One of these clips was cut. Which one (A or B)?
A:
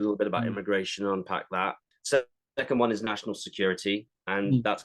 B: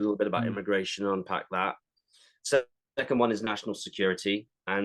A